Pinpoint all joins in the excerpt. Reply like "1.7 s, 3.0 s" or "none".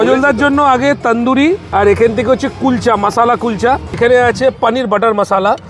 1.6 s, 3.9 s